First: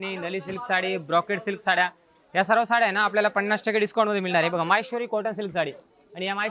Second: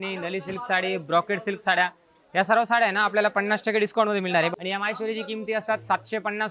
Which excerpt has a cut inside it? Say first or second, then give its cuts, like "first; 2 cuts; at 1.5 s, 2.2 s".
second; 1 cut; at 4.5 s